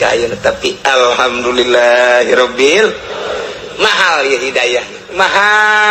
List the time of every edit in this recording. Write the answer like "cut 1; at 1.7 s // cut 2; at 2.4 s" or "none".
none